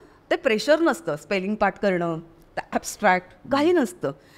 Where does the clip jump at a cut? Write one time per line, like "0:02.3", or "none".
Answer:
none